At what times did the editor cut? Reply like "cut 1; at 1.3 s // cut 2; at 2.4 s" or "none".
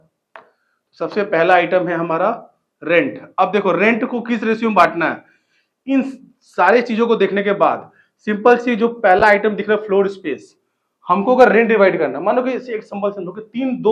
none

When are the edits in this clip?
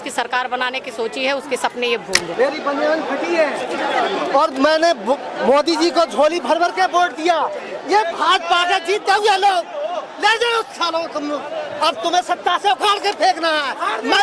cut 1; at 2.3 s

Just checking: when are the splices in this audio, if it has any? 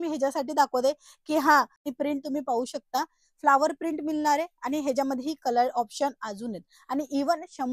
cut 1; at 1.9 s

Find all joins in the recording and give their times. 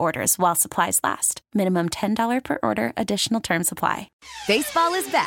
cut 1; at 4.2 s

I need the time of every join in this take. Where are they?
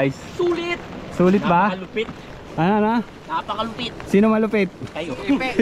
none

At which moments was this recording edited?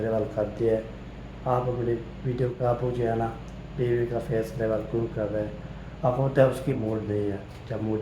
cut 1; at 2.5 s // cut 2; at 6.7 s

